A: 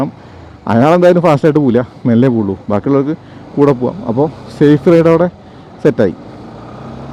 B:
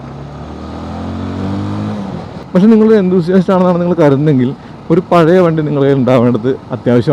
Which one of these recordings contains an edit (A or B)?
B